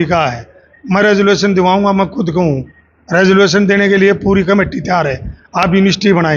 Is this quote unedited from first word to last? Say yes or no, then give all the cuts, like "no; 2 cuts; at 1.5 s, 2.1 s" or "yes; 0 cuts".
yes; 0 cuts